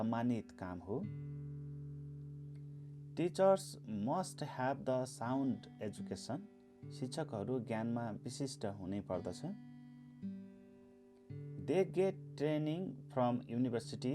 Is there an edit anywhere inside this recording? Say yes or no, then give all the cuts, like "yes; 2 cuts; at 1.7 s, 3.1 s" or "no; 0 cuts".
yes; 2 cuts; at 9.6 s, 11.6 s